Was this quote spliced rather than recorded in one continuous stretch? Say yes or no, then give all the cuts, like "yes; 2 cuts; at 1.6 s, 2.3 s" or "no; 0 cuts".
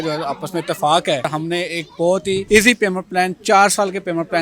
yes; 2 cuts; at 1.3 s, 2.4 s